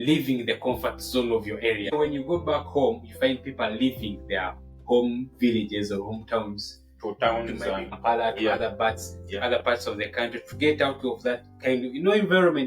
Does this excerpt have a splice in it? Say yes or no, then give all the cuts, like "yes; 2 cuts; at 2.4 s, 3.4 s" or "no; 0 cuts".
yes; 2 cuts; at 1.9 s, 8.0 s